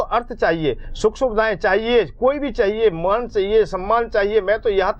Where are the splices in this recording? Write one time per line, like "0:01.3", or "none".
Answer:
none